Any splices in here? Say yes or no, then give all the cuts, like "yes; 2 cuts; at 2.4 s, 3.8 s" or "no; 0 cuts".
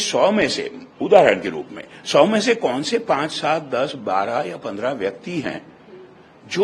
no; 0 cuts